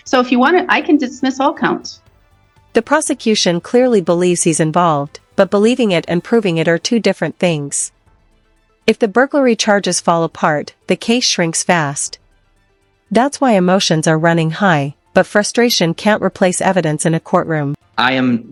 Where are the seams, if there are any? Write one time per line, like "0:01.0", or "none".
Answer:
none